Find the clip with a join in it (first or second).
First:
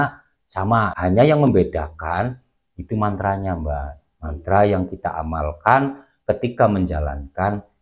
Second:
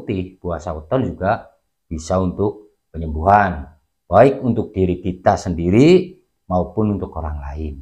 first